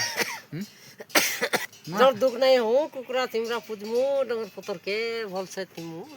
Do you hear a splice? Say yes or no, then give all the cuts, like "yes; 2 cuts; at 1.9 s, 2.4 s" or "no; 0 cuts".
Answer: yes; 1 cut; at 1.8 s